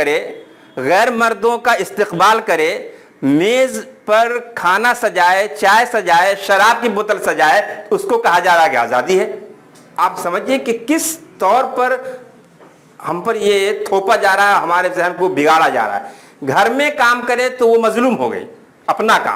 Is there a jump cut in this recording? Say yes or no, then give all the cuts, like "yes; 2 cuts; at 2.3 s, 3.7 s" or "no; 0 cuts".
no; 0 cuts